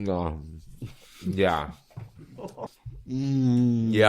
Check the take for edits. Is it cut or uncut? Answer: cut